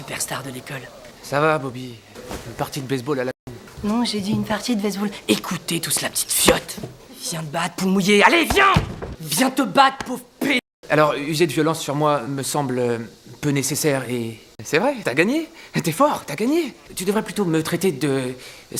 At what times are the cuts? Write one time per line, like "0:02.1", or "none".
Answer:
none